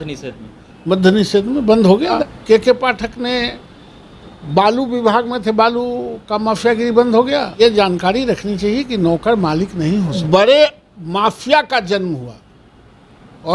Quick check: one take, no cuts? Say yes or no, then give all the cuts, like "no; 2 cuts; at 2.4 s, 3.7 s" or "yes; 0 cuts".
no; 3 cuts; at 2.2 s, 7.5 s, 10.2 s